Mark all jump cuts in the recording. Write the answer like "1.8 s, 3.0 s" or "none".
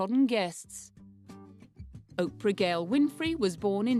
1.1 s